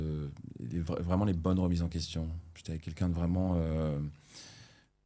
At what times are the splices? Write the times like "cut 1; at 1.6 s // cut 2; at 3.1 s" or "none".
none

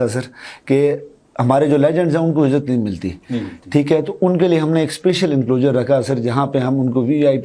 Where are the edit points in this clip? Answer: none

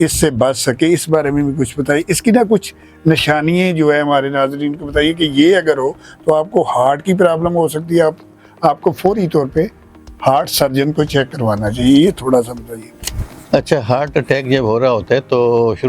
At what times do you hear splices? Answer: none

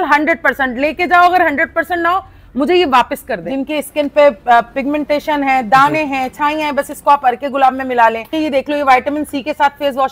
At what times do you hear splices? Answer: cut 1; at 3.4 s // cut 2; at 8.3 s

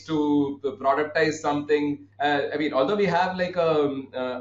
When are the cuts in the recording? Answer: cut 1; at 2.1 s

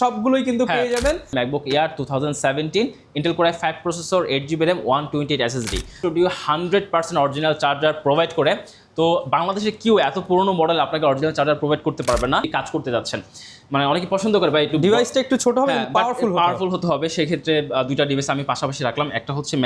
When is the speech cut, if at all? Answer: cut 1; at 1.3 s // cut 2; at 5.9 s // cut 3; at 12.5 s

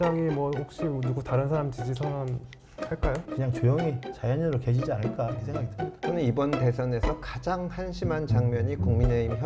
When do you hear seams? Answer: cut 1; at 3.3 s

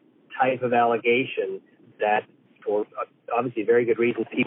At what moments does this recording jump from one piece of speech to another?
cut 1; at 2.4 s

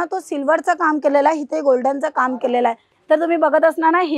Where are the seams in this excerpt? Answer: cut 1; at 2.9 s

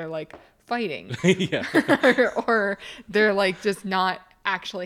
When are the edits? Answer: none

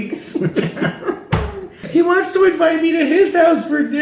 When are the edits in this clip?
cut 1; at 1.8 s

